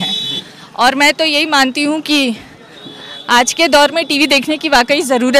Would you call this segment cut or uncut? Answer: uncut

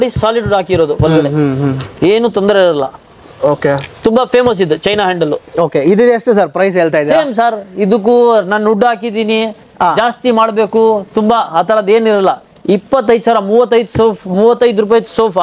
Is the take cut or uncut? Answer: uncut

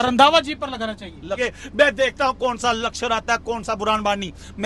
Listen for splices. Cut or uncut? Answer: cut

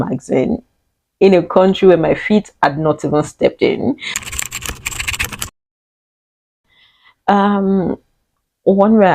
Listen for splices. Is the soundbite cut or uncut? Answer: cut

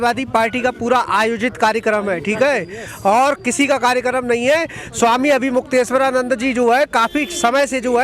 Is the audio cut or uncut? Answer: uncut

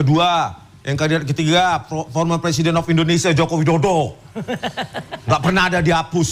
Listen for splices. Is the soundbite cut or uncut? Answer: uncut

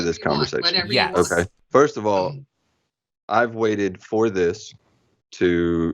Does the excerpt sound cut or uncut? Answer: cut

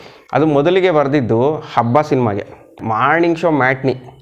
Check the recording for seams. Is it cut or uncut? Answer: cut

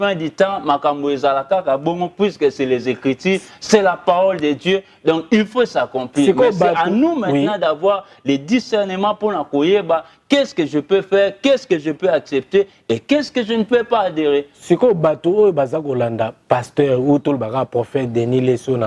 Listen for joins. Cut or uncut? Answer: uncut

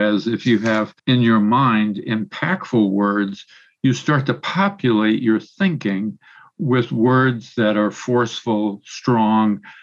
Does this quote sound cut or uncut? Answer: cut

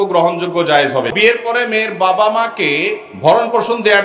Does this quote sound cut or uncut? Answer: cut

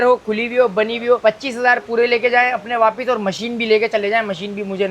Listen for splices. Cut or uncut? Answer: uncut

